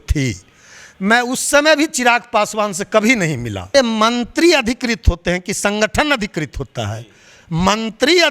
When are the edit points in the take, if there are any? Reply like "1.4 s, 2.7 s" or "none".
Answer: 3.7 s